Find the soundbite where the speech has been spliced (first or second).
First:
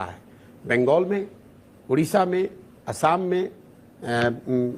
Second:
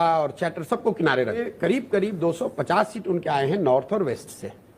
second